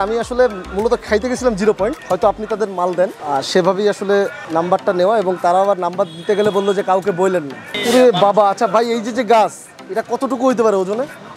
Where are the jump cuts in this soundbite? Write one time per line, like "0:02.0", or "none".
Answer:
0:02.0
0:03.2
0:04.4
0:07.7

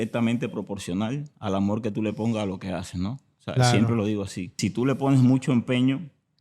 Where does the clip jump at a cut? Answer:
0:04.6

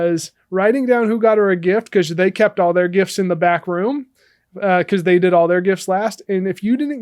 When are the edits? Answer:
none

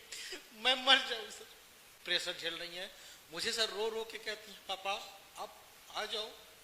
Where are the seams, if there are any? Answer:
0:02.0

